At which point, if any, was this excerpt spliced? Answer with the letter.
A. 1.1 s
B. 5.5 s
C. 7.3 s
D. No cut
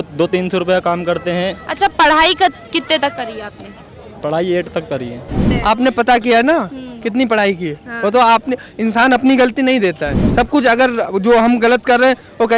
B